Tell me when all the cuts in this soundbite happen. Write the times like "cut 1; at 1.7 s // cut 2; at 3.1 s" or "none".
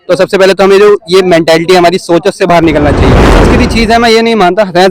cut 1; at 3.4 s